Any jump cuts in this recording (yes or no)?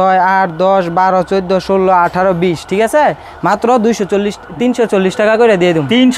no